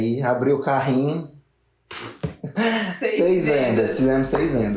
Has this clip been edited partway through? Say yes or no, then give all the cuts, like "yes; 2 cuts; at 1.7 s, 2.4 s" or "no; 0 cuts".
no; 0 cuts